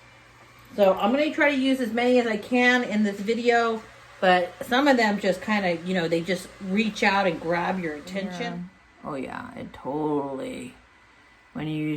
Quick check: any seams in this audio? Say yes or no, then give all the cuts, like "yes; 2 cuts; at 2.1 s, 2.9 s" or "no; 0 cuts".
yes; 1 cut; at 8.4 s